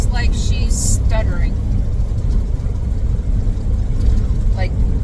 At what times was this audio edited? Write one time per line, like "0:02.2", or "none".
none